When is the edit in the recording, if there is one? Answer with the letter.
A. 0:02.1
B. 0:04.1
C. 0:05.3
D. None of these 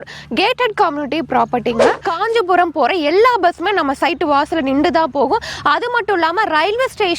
A